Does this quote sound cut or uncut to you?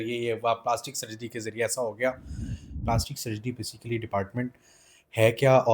cut